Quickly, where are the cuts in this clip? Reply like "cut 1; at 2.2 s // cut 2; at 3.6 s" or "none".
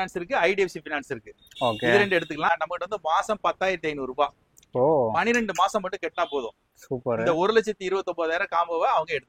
cut 1; at 2.5 s